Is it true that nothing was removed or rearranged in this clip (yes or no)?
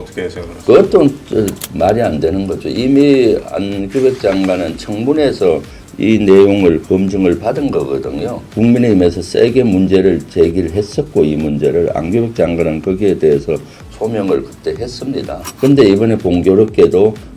no